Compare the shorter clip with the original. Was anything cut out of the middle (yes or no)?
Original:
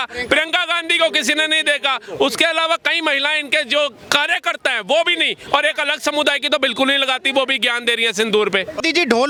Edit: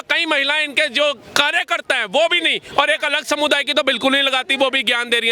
no